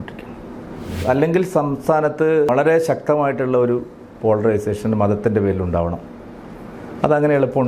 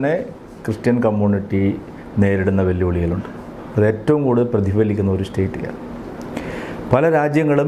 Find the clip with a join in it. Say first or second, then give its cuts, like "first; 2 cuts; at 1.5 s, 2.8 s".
first; 2 cuts; at 1.0 s, 2.5 s